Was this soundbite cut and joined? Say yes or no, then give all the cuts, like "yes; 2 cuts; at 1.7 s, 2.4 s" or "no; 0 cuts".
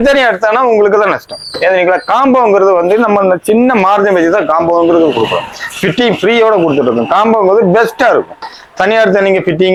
no; 0 cuts